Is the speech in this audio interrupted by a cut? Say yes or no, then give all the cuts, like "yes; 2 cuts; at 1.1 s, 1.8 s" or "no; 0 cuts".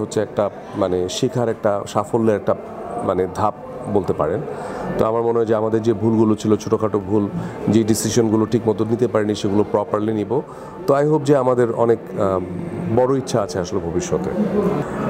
no; 0 cuts